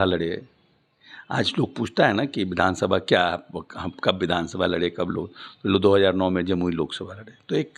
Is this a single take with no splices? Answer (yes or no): yes